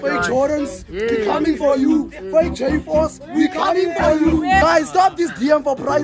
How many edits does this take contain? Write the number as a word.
one